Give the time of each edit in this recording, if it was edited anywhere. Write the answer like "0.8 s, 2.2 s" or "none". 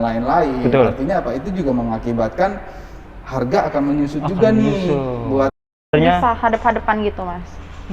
5.9 s